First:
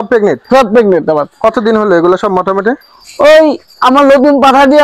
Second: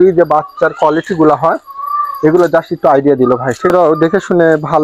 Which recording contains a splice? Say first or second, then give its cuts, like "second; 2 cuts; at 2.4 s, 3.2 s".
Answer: second; 1 cut; at 3.7 s